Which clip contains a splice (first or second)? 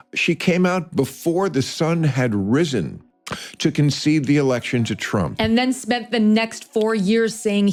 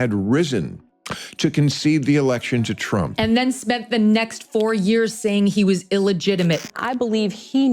second